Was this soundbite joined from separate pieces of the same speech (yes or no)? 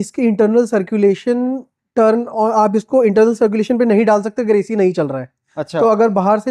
no